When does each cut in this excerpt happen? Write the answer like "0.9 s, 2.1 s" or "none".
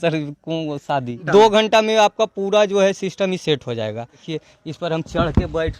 1.2 s, 4.2 s